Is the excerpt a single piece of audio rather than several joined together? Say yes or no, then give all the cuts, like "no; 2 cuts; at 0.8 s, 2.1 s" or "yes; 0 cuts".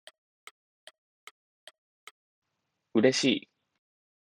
yes; 0 cuts